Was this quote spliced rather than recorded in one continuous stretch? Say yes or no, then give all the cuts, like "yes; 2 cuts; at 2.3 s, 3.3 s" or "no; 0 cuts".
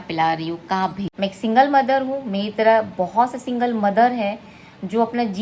yes; 1 cut; at 1.0 s